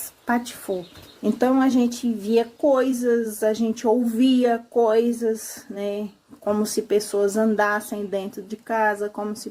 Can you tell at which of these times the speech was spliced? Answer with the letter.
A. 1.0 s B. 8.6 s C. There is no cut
A